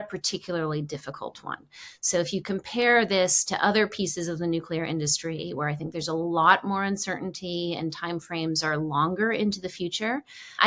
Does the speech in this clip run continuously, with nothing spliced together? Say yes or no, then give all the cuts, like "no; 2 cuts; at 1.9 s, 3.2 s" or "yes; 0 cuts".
yes; 0 cuts